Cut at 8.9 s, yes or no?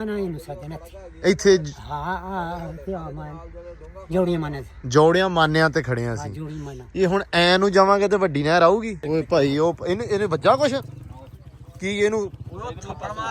yes